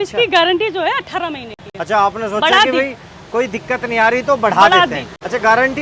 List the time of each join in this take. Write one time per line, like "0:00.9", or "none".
none